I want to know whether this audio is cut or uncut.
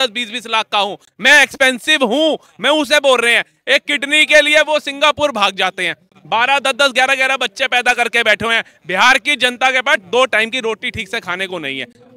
uncut